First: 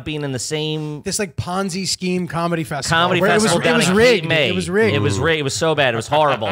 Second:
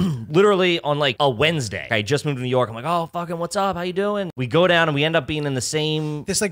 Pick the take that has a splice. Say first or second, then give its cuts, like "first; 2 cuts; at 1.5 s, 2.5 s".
second; 3 cuts; at 1.1 s, 1.9 s, 4.3 s